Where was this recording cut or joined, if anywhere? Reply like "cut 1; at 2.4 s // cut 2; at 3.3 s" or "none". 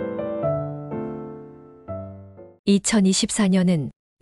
cut 1; at 2.4 s